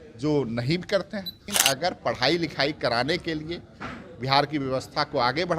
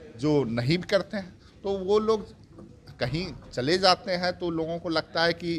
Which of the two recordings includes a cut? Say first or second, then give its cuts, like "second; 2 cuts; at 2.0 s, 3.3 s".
first; 1 cut; at 1.5 s